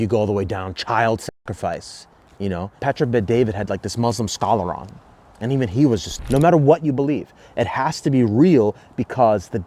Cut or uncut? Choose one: cut